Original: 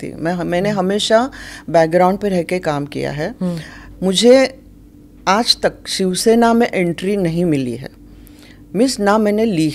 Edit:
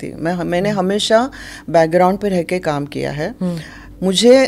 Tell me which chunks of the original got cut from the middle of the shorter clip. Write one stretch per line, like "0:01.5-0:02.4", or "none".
none